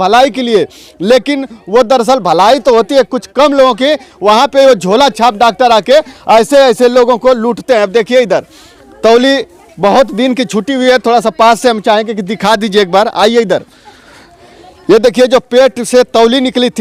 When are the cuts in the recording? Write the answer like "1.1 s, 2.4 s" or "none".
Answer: none